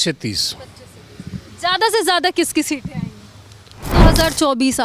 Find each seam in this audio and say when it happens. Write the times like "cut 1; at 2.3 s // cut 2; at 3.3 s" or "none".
cut 1; at 3.9 s

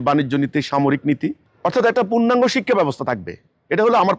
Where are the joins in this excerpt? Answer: cut 1; at 1.5 s

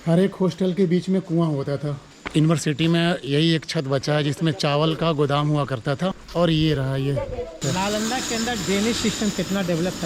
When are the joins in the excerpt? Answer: cut 1; at 2.1 s // cut 2; at 6.2 s // cut 3; at 7.6 s

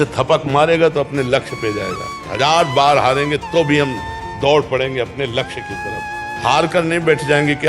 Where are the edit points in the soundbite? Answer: cut 1; at 2.2 s

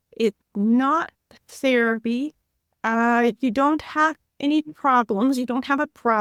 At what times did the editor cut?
none

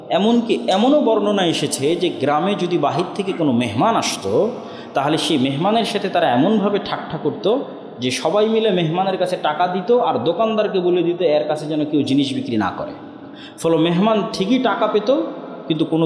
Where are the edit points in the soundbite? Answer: none

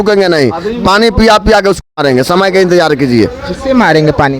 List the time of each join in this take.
none

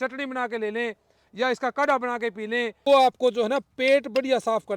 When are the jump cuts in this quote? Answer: cut 1; at 2.8 s

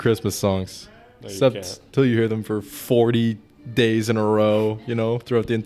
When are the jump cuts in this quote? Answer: none

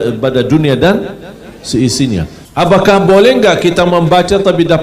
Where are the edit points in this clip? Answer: cut 1; at 2.4 s

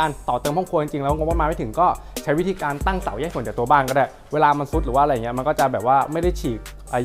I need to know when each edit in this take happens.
none

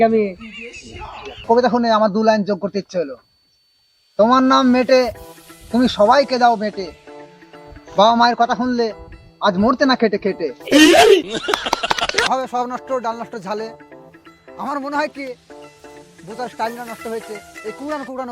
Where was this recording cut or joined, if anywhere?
cut 1; at 1.4 s // cut 2; at 12.3 s

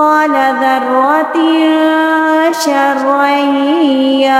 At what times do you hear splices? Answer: none

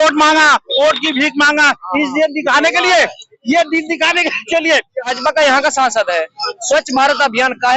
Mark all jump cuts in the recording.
cut 1; at 5.2 s

